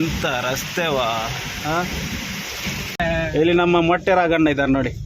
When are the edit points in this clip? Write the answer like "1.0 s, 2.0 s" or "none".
3.0 s

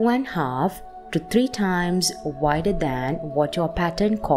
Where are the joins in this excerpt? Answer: none

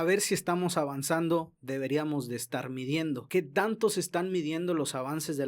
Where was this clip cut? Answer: 3.2 s

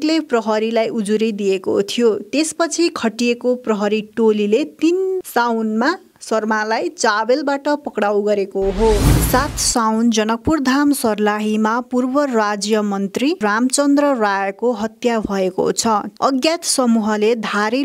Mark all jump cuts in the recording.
9.1 s, 16.1 s

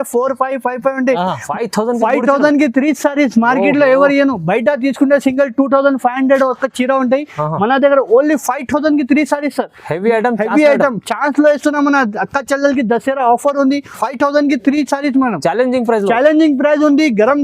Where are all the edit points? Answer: 1.4 s, 13.9 s

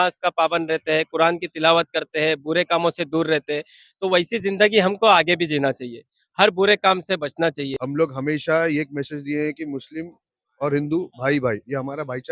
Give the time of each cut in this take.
7.7 s

